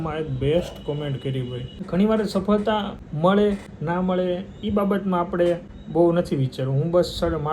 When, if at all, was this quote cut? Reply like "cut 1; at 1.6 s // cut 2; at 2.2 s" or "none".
cut 1; at 1.7 s // cut 2; at 3.0 s // cut 3; at 3.7 s // cut 4; at 5.8 s